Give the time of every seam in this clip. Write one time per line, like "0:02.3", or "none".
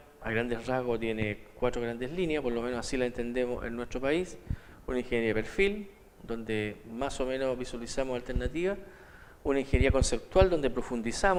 none